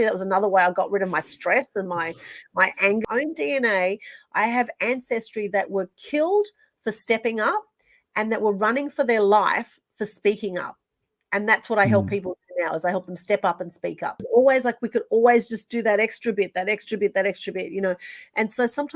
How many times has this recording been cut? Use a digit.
2